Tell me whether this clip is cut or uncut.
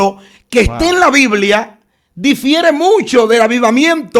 uncut